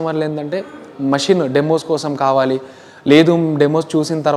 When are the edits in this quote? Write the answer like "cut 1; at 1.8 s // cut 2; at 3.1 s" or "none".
none